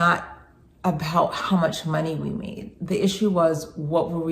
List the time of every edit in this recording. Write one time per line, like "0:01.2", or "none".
none